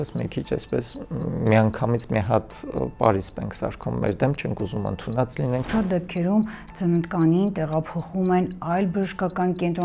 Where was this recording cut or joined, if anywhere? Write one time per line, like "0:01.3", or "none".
0:05.7